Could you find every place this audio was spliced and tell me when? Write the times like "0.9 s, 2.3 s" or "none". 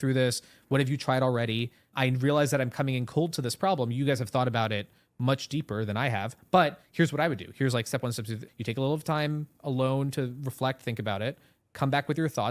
1.9 s, 8.4 s